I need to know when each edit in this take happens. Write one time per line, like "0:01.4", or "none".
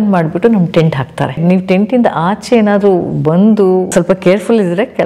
0:01.4
0:03.9